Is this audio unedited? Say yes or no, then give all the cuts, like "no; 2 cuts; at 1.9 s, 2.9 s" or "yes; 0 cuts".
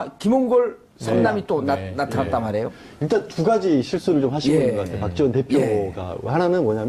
yes; 0 cuts